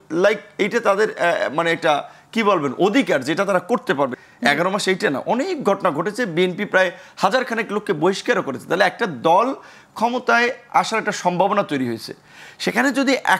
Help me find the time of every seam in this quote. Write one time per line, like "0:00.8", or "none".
0:04.2